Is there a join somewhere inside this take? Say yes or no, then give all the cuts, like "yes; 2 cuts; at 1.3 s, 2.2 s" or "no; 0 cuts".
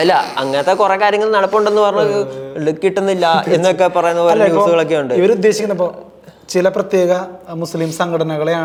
no; 0 cuts